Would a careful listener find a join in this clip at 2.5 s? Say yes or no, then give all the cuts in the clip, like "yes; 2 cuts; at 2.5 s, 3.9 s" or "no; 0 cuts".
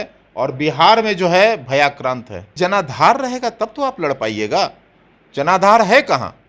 yes; 1 cut; at 2.5 s